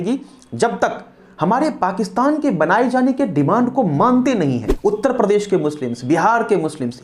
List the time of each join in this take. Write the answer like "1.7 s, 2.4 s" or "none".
1.3 s, 4.7 s